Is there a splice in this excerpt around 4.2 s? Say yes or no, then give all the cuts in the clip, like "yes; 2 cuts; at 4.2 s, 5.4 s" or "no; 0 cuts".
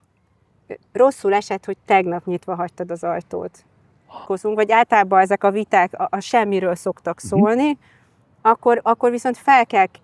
yes; 1 cut; at 4.2 s